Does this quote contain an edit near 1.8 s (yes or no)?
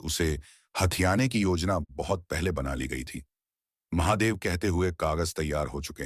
no